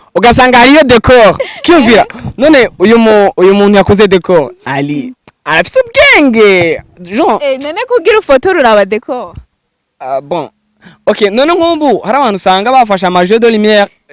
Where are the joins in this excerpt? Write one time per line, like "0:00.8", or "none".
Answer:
none